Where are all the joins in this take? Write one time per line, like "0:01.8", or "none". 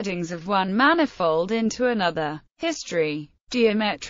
none